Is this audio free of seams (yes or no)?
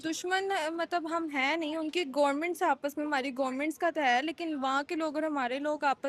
yes